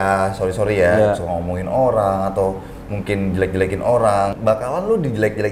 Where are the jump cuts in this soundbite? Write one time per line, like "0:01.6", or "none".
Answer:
0:04.3